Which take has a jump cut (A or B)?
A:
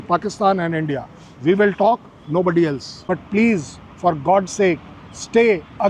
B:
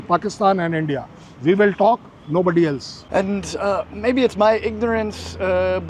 A